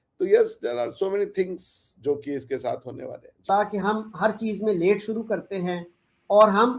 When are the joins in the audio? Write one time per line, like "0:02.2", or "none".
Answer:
0:03.4